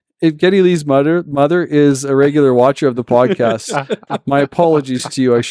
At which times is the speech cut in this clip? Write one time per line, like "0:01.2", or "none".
none

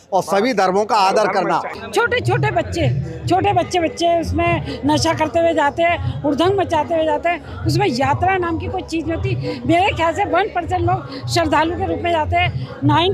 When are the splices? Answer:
0:01.7

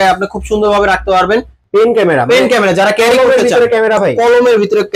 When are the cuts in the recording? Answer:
0:01.5

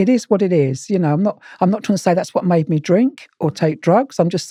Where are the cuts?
none

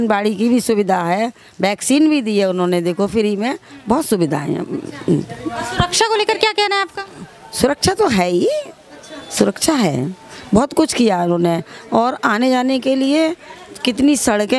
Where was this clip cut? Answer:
none

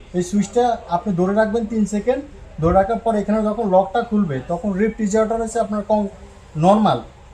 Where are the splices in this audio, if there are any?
none

